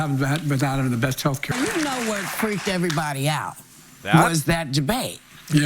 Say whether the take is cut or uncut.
cut